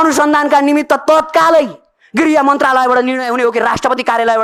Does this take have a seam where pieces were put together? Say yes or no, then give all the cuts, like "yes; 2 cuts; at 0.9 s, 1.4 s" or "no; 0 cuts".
no; 0 cuts